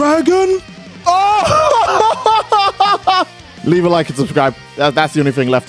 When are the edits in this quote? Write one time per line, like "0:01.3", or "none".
0:03.4